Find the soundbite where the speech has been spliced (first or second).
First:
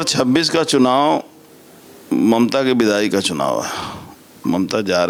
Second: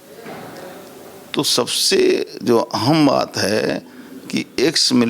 second